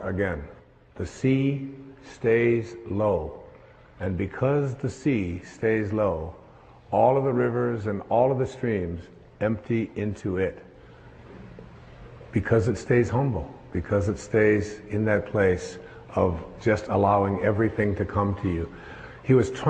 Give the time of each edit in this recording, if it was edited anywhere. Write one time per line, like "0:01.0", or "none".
0:08.3